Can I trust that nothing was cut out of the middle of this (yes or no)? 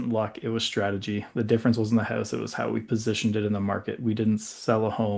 yes